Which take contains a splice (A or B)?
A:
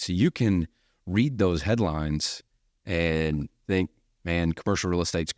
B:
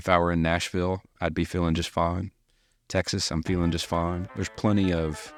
A